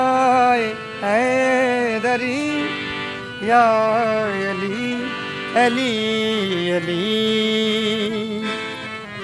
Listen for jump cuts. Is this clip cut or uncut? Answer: uncut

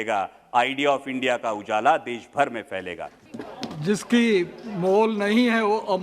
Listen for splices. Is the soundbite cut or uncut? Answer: cut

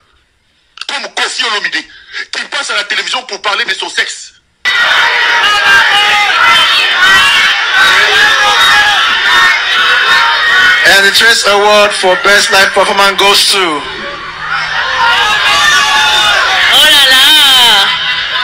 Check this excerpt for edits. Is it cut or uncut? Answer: cut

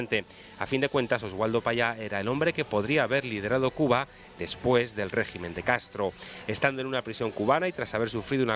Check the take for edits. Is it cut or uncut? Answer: uncut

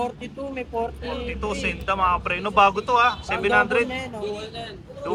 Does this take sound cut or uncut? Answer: uncut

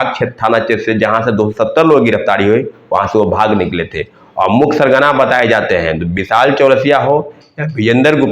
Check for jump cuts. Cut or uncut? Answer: uncut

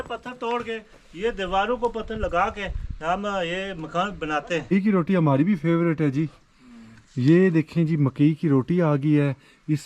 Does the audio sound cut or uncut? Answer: cut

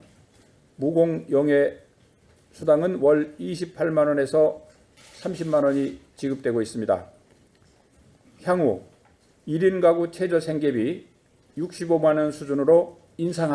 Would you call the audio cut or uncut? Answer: uncut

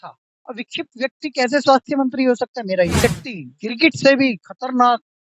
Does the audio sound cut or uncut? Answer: cut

